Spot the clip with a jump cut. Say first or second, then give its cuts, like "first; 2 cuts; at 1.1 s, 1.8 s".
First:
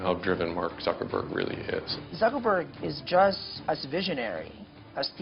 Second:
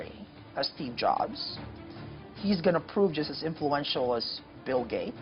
first; 2 cuts; at 2.0 s, 3.5 s